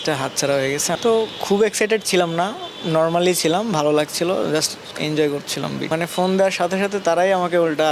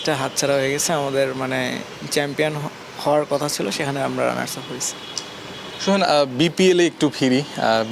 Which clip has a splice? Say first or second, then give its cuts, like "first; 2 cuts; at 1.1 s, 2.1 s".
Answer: first; 2 cuts; at 0.9 s, 5.9 s